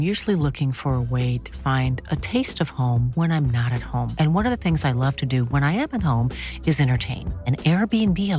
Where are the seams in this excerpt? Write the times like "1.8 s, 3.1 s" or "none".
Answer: none